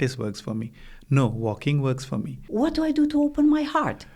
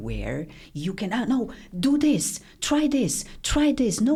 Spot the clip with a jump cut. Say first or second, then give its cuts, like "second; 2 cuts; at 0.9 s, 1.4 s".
first; 1 cut; at 2.4 s